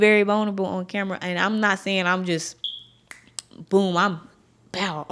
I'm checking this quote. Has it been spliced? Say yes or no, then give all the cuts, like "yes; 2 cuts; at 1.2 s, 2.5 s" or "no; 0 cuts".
no; 0 cuts